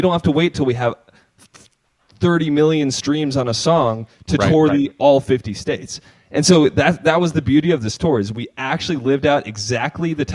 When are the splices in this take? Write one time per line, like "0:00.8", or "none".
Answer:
none